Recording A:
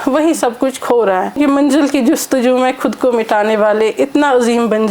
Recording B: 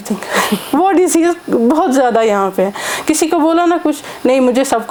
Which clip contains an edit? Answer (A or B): A